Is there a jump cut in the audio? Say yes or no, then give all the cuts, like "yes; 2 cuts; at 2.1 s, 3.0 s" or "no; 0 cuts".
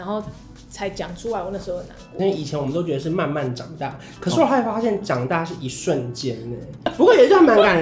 yes; 2 cuts; at 2.0 s, 6.8 s